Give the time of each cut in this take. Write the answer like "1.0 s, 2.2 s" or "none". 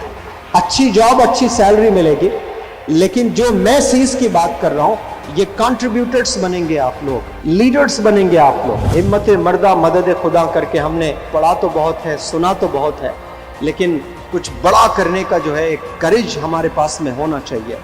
7.3 s, 8.8 s